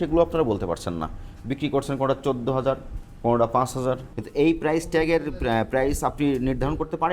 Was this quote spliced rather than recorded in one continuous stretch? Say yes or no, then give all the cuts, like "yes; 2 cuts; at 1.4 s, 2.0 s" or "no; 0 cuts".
yes; 1 cut; at 4.1 s